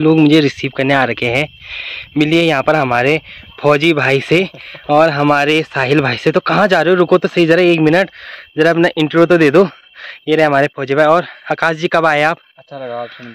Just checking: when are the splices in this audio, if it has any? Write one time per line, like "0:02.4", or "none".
none